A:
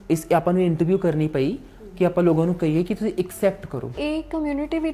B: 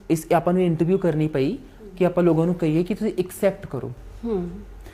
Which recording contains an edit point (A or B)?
A